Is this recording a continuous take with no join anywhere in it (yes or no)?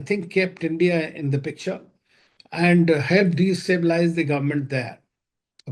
yes